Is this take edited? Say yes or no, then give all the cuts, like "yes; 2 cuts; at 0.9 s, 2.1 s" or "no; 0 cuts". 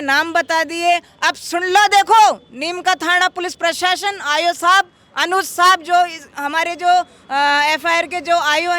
no; 0 cuts